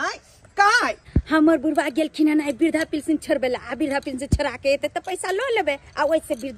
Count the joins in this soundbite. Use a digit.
1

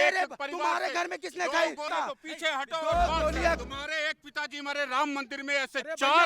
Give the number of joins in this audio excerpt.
2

